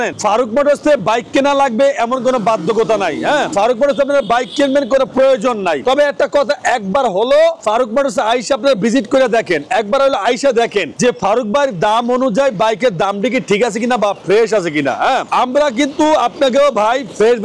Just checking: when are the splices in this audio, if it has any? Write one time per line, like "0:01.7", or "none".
none